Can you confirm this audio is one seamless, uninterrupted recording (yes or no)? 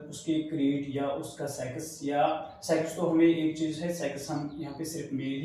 yes